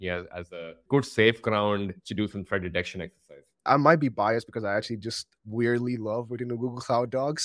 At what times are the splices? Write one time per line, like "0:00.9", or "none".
0:03.7
0:05.3